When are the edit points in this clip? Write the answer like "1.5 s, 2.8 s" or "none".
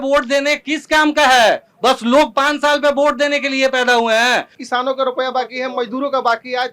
4.6 s